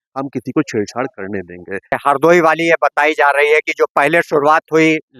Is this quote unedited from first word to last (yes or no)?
no